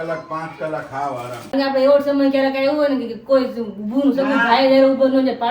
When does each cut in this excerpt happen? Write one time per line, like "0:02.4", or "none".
0:01.4